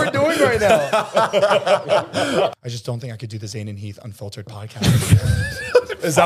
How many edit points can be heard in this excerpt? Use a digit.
1